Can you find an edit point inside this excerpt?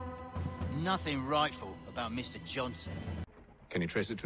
yes; 1 cut; at 3.3 s

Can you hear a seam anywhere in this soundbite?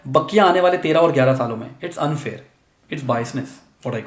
no; 0 cuts

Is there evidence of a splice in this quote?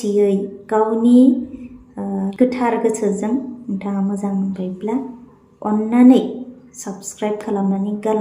yes; 1 cut; at 2.3 s

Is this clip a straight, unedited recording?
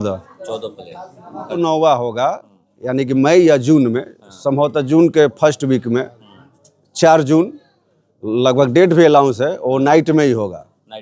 no; 1 cut; at 1.6 s

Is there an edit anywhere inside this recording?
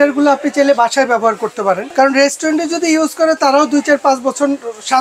yes; 1 cut; at 1.9 s

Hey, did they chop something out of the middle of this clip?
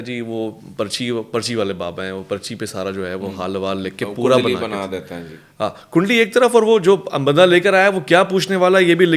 no; 0 cuts

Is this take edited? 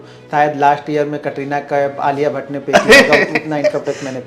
no; 0 cuts

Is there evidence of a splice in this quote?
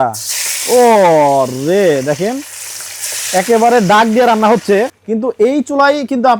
yes; 1 cut; at 4.9 s

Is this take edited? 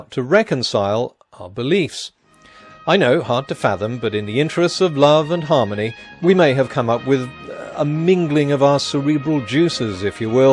yes; 1 cut; at 3.2 s

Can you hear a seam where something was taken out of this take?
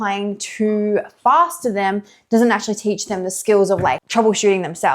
yes; 1 cut; at 4.0 s

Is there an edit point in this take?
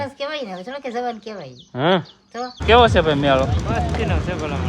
yes; 1 cut; at 2.6 s

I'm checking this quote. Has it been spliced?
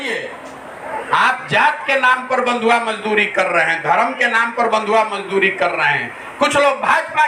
no; 0 cuts

